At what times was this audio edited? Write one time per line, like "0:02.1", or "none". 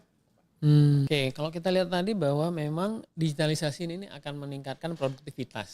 0:01.1